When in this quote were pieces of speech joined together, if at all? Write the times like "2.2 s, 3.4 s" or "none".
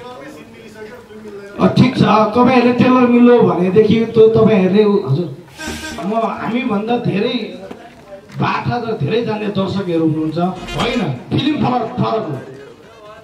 6.0 s, 10.7 s